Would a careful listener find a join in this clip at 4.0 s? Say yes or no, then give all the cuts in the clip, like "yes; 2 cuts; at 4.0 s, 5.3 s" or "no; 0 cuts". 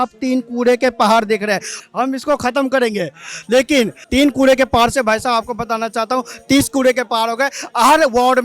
yes; 2 cuts; at 1.7 s, 4.0 s